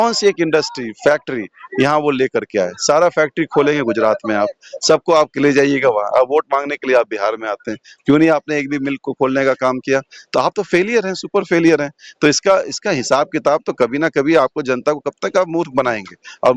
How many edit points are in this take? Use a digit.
0